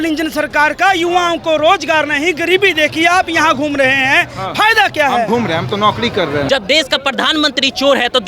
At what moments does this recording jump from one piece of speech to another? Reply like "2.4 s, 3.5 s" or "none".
6.5 s